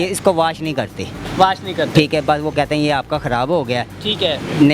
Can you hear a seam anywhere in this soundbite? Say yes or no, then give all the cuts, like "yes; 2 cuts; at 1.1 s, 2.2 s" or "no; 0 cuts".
no; 0 cuts